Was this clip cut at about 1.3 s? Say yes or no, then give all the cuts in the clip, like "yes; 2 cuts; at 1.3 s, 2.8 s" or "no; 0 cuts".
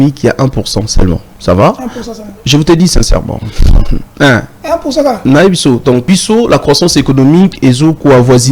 yes; 2 cuts; at 1.3 s, 6.0 s